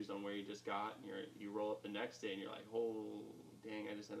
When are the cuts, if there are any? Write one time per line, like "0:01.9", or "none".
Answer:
none